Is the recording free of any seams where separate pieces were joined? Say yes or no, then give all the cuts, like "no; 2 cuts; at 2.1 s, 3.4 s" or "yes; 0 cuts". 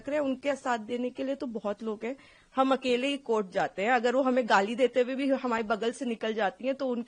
yes; 0 cuts